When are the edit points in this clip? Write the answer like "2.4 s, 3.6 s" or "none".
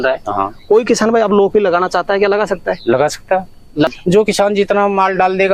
3.9 s